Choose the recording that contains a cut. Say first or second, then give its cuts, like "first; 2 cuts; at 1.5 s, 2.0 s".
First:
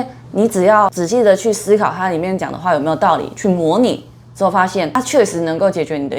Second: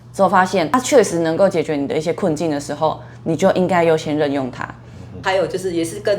second; 1 cut; at 5.2 s